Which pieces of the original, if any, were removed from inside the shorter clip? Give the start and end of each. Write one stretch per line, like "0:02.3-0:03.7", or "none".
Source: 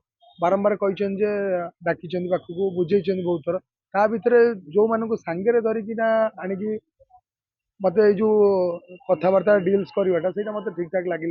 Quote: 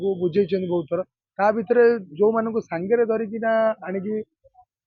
none